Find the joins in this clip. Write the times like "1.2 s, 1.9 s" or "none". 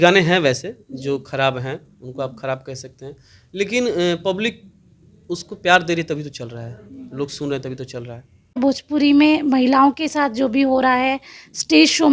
8.6 s